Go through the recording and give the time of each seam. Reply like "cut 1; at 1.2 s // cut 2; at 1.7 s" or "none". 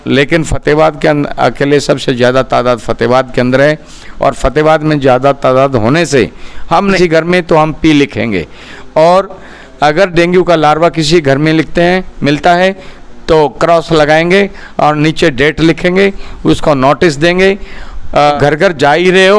cut 1; at 7.0 s // cut 2; at 18.3 s